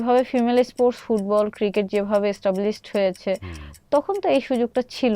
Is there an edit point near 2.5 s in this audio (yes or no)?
no